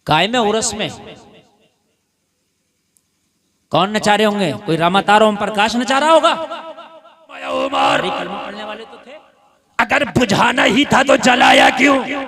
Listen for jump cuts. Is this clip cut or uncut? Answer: cut